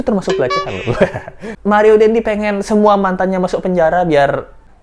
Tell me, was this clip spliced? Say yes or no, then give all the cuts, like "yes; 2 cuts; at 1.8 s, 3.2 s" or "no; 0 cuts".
yes; 1 cut; at 1.5 s